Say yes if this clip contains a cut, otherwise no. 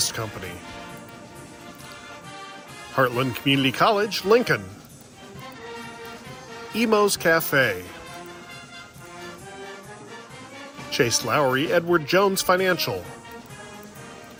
no